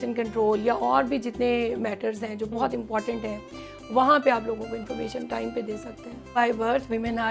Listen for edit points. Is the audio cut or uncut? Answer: cut